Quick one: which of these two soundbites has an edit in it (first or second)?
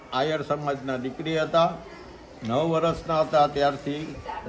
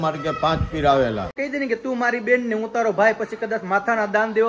second